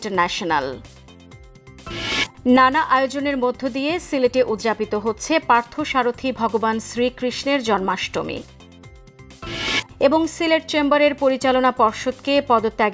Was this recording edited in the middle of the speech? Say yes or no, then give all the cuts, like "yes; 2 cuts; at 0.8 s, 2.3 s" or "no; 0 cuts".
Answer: no; 0 cuts